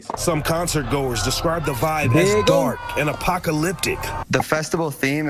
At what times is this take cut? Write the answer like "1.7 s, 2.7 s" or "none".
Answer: none